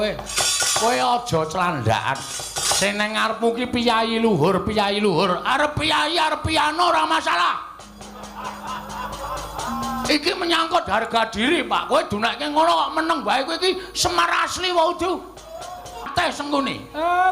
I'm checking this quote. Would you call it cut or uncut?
cut